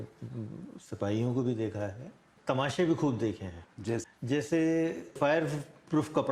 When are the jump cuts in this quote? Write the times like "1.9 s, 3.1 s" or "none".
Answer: 2.3 s, 4.0 s